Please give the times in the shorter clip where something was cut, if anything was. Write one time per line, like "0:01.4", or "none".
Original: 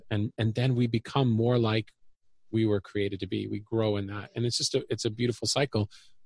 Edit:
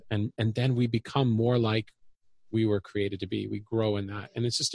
none